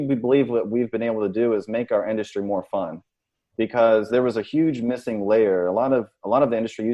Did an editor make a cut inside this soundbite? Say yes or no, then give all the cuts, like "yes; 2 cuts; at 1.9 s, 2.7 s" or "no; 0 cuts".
no; 0 cuts